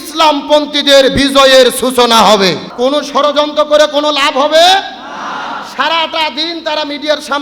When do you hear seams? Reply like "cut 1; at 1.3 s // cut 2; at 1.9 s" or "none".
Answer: cut 1; at 2.7 s

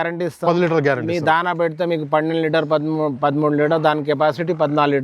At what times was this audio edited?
none

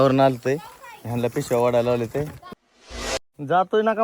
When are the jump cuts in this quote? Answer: cut 1; at 2.9 s

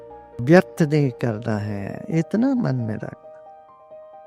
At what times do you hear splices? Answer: none

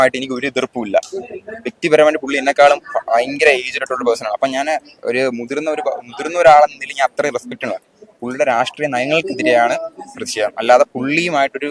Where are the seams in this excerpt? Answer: none

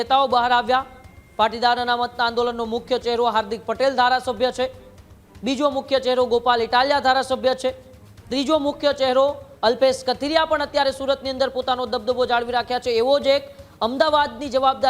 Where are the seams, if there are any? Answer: none

